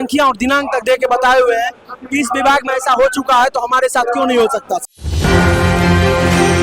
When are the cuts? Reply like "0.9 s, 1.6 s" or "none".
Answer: 5.0 s